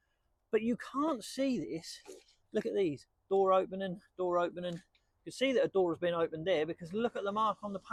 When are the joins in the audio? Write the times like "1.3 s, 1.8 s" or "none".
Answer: none